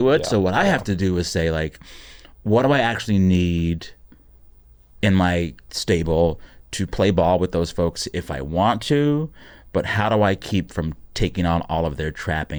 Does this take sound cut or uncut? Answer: uncut